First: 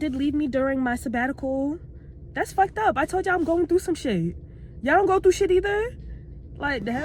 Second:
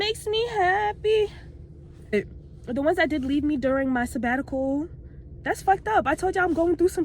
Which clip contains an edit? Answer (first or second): second